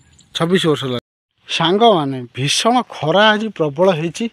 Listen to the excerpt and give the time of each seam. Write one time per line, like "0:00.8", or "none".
0:01.0